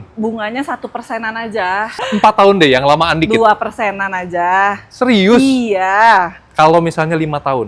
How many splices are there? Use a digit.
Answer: 1